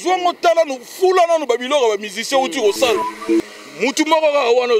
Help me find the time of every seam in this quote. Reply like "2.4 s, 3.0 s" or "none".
3.1 s